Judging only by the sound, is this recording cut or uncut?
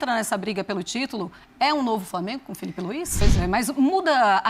cut